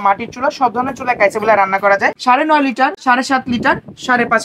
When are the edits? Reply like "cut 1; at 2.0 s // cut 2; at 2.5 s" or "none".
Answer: cut 1; at 2.2 s // cut 2; at 3.0 s